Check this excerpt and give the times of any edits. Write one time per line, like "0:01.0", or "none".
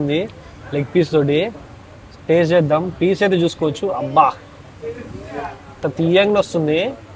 none